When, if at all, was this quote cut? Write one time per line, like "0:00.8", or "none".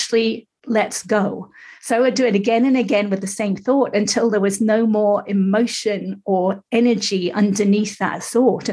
none